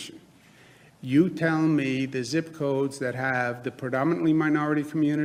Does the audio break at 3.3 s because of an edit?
no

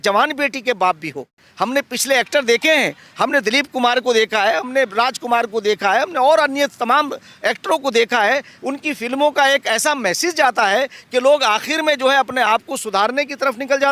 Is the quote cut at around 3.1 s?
no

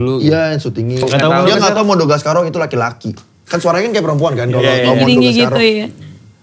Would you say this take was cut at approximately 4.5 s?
no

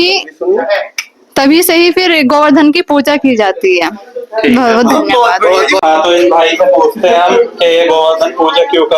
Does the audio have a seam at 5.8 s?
yes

